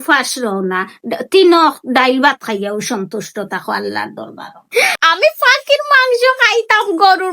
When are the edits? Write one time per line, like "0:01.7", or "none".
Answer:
0:04.9